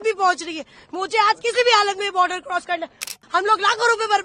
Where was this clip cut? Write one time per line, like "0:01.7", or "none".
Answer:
0:03.1